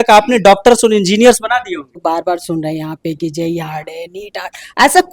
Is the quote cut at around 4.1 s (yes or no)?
no